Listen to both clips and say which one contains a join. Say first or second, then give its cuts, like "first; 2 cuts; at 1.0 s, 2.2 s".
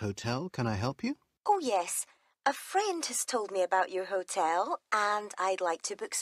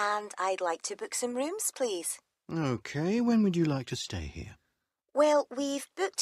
first; 1 cut; at 1.3 s